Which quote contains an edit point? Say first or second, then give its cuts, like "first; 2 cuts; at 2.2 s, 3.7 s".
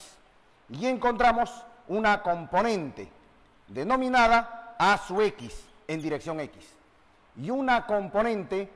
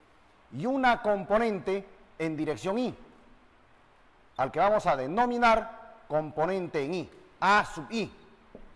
first; 1 cut; at 1.2 s